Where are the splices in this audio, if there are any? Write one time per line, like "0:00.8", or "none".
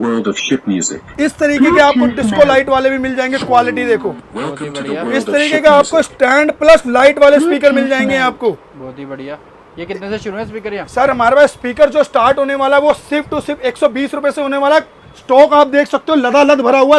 none